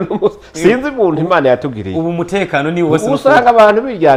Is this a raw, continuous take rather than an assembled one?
yes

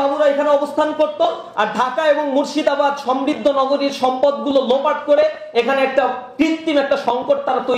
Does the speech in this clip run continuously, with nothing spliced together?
yes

